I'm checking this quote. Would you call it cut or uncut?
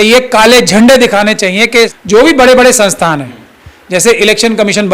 cut